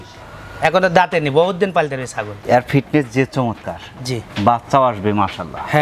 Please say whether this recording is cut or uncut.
cut